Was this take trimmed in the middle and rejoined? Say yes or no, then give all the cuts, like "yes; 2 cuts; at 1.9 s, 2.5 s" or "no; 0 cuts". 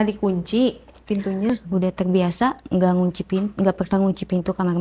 yes; 1 cut; at 1.5 s